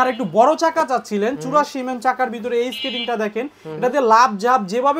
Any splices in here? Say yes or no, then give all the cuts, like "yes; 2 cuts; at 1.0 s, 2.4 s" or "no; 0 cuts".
no; 0 cuts